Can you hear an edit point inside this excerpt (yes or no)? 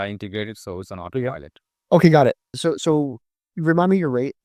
yes